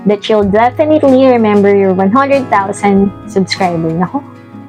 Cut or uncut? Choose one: uncut